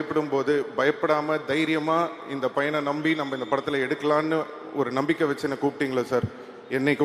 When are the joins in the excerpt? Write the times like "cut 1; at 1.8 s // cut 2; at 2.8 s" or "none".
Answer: none